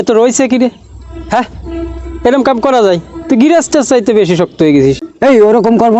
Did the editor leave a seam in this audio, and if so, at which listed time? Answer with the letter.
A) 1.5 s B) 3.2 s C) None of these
C